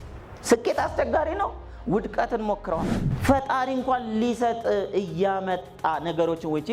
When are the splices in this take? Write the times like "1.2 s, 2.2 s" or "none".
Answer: 3.0 s